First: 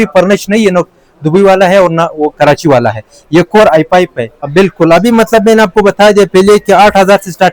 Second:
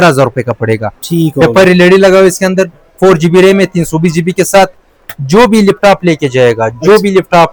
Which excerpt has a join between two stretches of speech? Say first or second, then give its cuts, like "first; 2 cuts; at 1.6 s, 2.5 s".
first; 1 cut; at 4.5 s